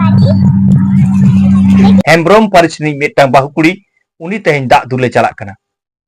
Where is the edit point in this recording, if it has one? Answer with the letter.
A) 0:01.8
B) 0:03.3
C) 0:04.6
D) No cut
A